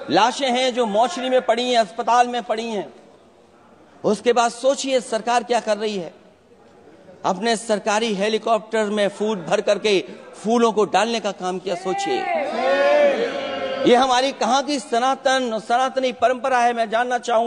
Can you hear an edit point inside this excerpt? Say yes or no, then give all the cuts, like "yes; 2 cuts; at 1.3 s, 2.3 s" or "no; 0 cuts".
no; 0 cuts